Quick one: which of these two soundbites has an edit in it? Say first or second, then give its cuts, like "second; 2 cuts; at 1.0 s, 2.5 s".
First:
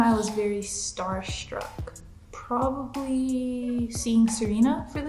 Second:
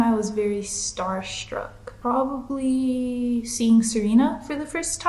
second; 1 cut; at 1.8 s